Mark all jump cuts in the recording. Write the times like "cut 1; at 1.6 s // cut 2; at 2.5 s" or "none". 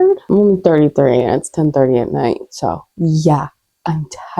none